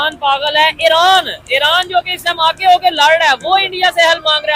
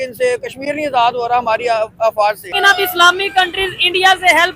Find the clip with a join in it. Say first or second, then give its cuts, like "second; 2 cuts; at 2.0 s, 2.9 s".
second; 1 cut; at 2.5 s